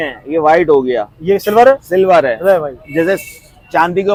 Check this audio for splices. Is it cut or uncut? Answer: uncut